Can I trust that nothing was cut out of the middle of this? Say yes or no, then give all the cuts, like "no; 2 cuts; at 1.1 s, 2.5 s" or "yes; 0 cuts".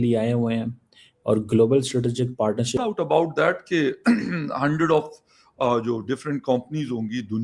no; 1 cut; at 2.8 s